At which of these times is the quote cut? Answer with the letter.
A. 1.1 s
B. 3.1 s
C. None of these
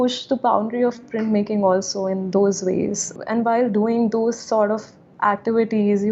B